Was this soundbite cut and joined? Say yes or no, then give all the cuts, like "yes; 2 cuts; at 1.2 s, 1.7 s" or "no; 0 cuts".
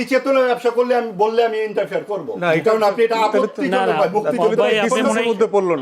no; 0 cuts